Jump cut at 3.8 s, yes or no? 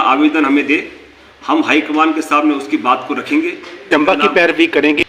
yes